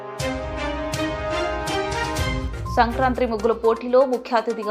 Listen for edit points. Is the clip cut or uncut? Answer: cut